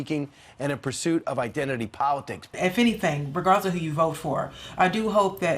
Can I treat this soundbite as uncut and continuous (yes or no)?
no